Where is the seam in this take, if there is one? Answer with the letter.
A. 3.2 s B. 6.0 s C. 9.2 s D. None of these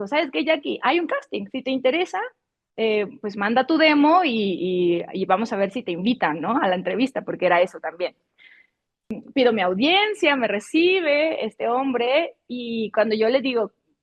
C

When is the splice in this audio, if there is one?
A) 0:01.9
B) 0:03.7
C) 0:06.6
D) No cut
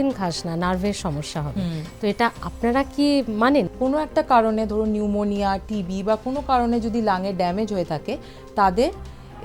B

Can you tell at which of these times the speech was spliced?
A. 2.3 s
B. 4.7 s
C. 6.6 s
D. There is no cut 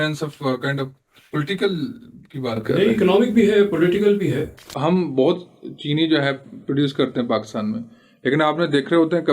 B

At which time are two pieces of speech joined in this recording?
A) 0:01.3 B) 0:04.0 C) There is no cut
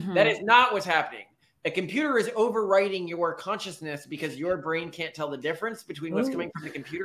C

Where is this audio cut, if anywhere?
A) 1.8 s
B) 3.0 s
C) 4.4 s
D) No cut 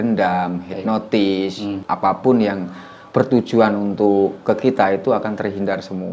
A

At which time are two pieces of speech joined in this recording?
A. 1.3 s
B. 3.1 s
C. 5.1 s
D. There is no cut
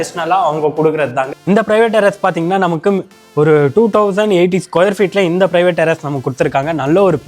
A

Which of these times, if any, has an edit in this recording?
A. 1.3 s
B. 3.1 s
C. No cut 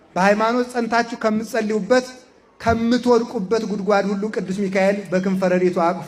C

